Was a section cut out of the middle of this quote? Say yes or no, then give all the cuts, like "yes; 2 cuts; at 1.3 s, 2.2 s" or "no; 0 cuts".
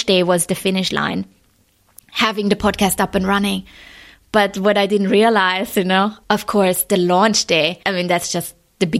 yes; 2 cuts; at 6.2 s, 7.8 s